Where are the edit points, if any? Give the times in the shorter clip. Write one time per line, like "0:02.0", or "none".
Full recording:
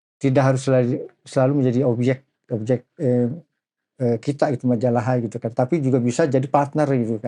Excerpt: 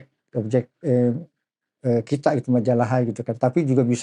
none